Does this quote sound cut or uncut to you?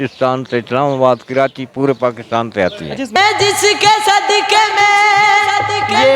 cut